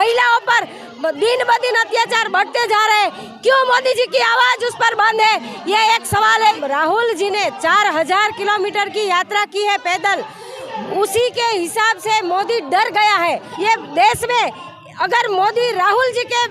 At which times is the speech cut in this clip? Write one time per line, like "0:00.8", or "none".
0:06.6
0:13.5